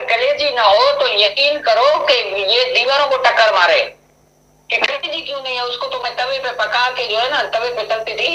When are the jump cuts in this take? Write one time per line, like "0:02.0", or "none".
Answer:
none